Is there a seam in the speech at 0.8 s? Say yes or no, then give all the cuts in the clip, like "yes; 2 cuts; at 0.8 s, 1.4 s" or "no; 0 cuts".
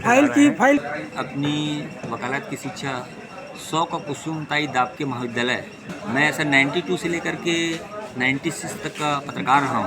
yes; 2 cuts; at 0.8 s, 5.8 s